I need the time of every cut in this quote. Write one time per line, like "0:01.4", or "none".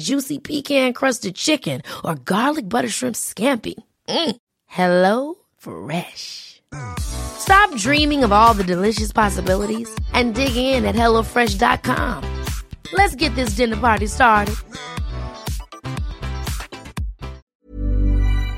0:17.4